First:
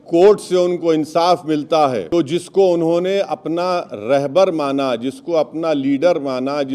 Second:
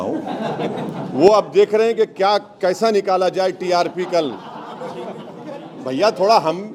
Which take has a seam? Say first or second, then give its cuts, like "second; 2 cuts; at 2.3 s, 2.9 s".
first; 1 cut; at 2.1 s